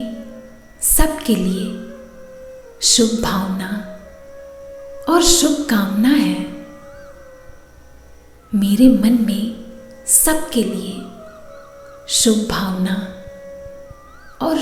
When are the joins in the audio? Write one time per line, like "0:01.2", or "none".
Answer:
none

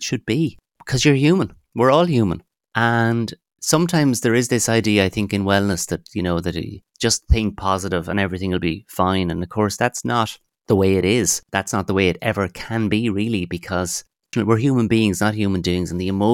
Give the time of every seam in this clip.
0:11.4
0:14.3

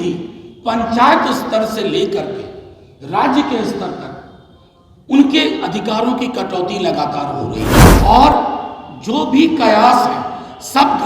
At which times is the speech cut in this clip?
0:07.8

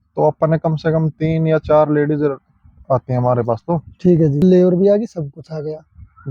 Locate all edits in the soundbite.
0:04.4

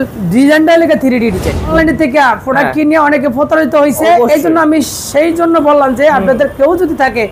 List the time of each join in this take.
0:01.7

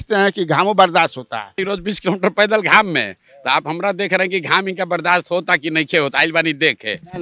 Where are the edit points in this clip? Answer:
0:01.5

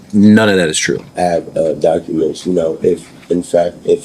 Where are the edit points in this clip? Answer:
0:01.1

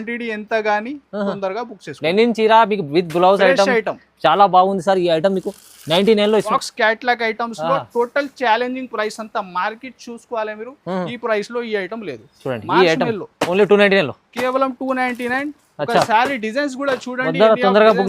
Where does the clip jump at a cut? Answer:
0:06.5

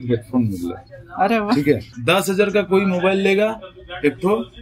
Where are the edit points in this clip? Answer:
0:02.0

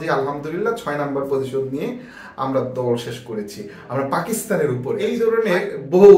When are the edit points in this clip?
0:05.2

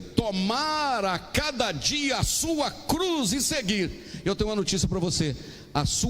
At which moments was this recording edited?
none

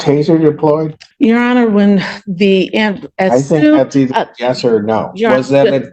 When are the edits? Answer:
0:01.0

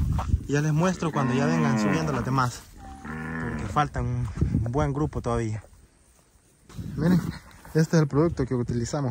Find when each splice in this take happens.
0:06.8

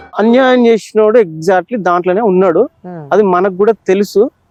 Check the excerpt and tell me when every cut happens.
none

